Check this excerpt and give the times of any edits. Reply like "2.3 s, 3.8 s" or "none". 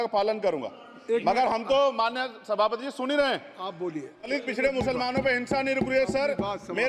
4.3 s